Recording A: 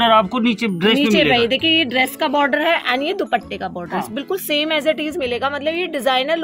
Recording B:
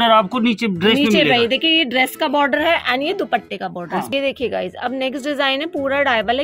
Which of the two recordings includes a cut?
B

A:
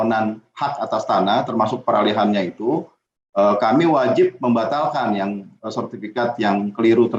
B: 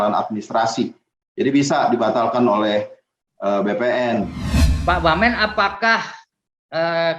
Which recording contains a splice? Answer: B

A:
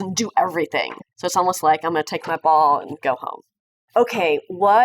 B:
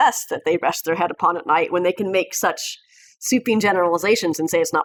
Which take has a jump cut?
A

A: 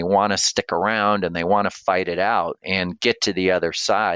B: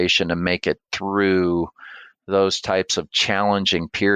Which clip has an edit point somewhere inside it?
A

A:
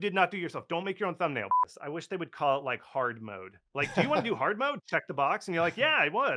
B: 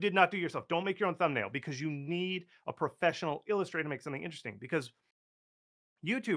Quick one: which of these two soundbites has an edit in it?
A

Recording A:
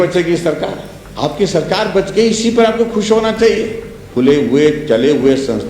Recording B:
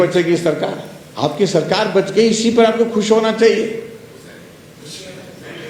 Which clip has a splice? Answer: A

